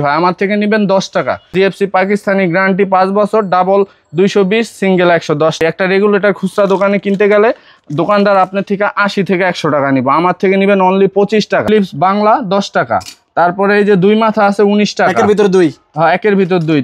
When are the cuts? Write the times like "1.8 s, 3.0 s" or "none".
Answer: 1.4 s, 5.6 s, 11.6 s